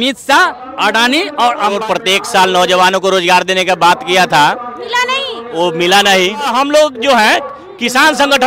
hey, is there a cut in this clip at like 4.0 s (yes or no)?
no